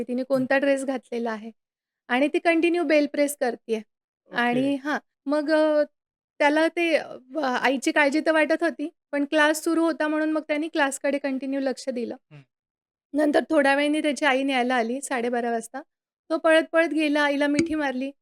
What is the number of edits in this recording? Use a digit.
1